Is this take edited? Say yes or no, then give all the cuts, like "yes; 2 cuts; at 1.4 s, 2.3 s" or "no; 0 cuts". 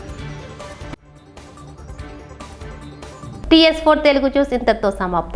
no; 0 cuts